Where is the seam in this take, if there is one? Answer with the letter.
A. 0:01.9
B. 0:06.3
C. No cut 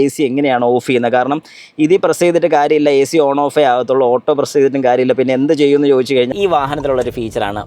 B